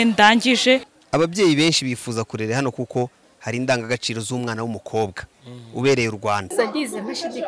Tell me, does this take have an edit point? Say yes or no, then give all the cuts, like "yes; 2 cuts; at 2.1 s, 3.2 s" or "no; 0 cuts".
yes; 2 cuts; at 0.9 s, 6.5 s